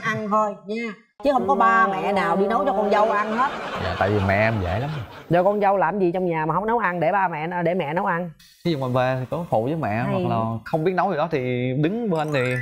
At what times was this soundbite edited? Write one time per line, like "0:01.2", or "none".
none